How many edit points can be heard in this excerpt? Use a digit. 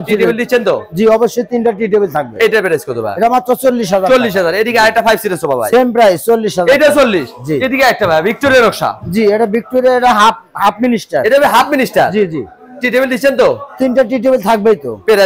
0